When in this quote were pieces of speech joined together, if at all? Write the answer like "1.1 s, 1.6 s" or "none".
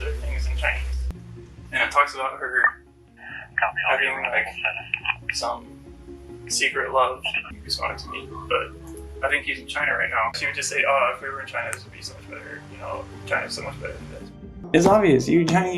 1.0 s, 7.4 s, 10.4 s, 14.5 s